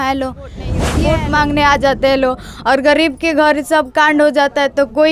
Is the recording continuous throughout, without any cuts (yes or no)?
no